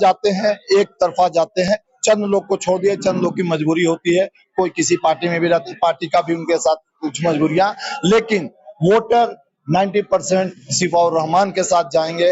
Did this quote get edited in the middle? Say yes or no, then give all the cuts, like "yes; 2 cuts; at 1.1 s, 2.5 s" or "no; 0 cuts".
no; 0 cuts